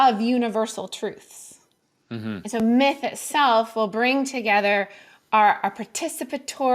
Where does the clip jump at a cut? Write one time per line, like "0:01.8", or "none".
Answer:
none